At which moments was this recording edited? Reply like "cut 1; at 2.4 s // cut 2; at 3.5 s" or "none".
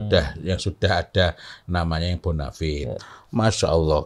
cut 1; at 3.1 s